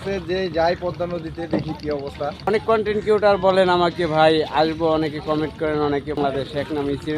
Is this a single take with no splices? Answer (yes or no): no